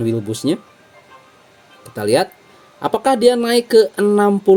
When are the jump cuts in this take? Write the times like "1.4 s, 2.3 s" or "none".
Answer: none